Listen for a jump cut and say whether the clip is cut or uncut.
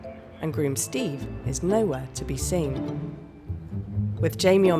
cut